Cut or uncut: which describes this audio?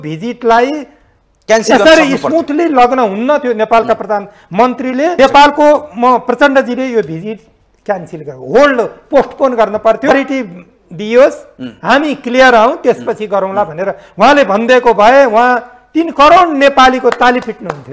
cut